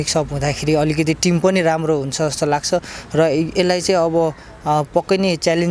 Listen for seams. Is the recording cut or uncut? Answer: uncut